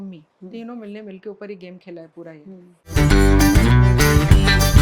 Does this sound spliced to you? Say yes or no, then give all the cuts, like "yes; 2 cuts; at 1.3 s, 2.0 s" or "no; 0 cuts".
yes; 1 cut; at 2.7 s